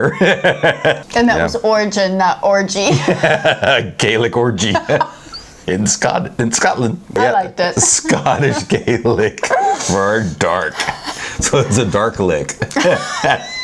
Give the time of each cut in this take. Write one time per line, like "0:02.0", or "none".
0:01.0
0:07.2